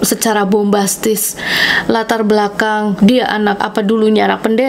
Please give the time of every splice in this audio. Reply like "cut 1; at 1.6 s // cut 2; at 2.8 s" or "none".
cut 1; at 3.0 s // cut 2; at 3.6 s

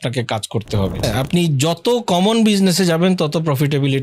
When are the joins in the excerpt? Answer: cut 1; at 1.0 s

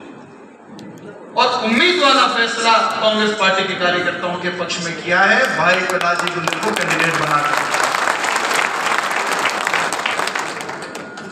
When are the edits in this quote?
none

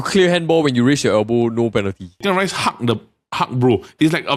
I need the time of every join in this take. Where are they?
cut 1; at 2.2 s

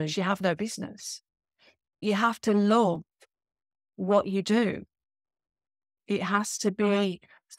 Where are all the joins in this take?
cut 1; at 2.0 s

